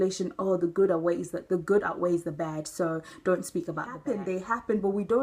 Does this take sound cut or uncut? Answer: cut